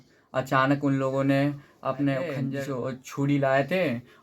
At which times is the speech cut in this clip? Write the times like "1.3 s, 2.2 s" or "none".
2.4 s